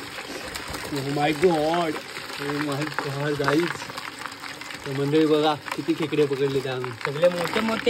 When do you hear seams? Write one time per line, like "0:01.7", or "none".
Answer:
none